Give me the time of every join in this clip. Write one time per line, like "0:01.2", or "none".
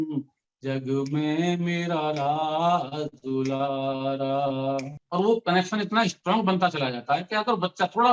0:05.0

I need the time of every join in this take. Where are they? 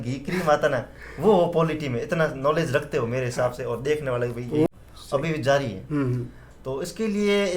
0:04.7

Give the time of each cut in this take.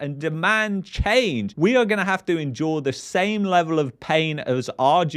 none

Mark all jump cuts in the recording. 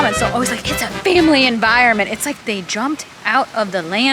0:02.4

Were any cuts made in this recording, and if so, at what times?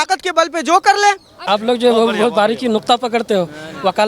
0:01.3

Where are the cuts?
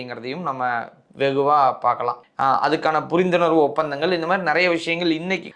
none

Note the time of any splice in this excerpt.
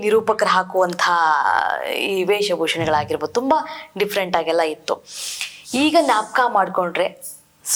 none

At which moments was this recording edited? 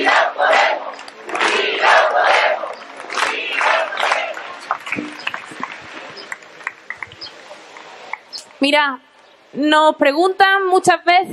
none

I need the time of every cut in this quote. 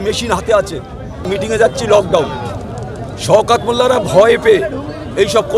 0:01.3

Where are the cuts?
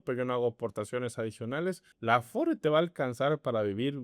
0:01.9

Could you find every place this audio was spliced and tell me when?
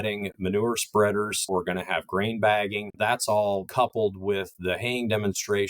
0:01.5
0:02.9
0:03.7

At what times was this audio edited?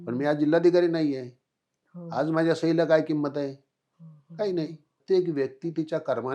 0:05.0

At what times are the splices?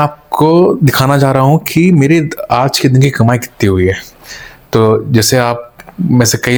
none

